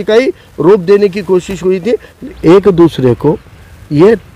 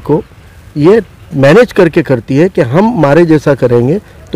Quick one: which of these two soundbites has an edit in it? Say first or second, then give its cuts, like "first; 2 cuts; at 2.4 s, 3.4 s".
first; 1 cut; at 2.2 s